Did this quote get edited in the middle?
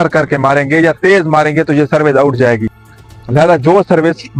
no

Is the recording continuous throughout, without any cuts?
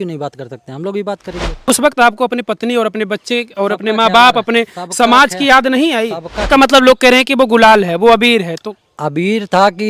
no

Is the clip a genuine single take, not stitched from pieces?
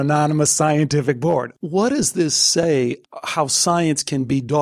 no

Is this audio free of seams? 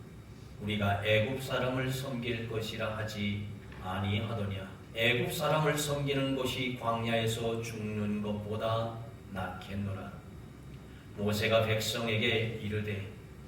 no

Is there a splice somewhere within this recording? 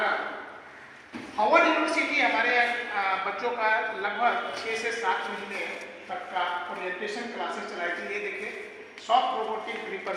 no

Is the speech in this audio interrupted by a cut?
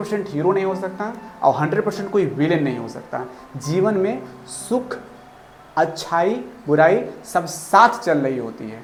no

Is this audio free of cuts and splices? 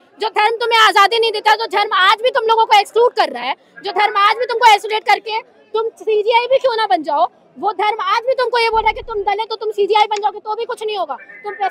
yes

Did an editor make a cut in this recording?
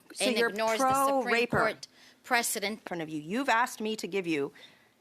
yes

